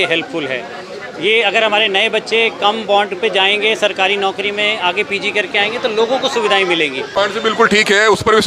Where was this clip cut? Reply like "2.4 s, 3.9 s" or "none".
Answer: 7.1 s